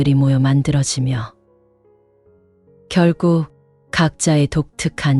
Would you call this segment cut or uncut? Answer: uncut